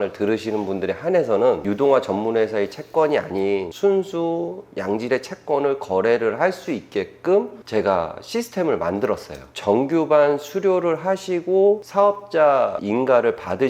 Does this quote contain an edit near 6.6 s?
no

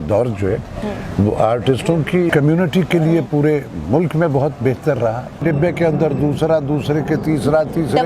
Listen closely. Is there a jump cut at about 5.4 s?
yes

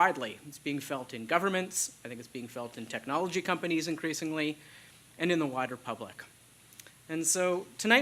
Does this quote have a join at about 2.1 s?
yes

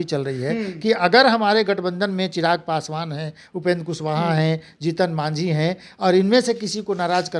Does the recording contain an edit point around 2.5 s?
no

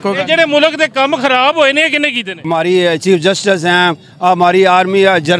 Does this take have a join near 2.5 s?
yes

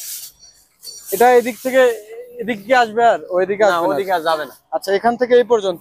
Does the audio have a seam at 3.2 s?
no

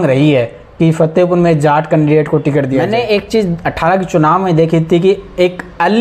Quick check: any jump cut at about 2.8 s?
yes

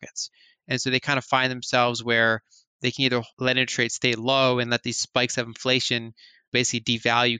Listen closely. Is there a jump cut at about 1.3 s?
no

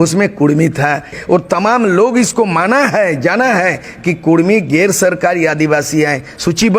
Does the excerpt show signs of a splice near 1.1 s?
yes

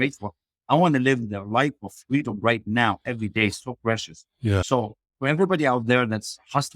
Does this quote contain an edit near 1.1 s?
no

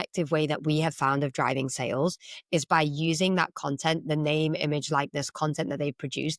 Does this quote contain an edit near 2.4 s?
no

